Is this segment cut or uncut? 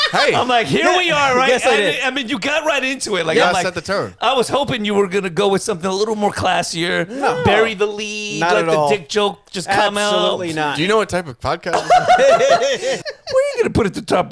cut